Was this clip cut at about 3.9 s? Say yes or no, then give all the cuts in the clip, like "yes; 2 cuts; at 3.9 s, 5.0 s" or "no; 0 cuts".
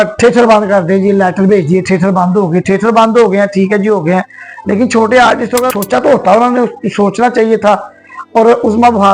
no; 1 cut; at 5.7 s